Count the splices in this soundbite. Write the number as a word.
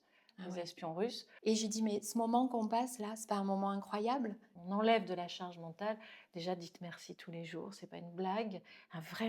two